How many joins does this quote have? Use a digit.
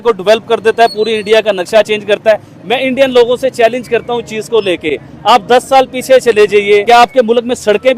1